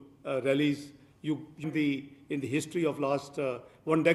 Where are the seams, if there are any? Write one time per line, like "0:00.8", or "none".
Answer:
0:01.6